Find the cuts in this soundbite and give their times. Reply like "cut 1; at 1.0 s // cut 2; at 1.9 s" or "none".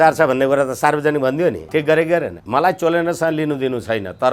cut 1; at 1.6 s // cut 2; at 2.4 s